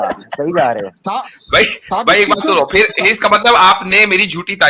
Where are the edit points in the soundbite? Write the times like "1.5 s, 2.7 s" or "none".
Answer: none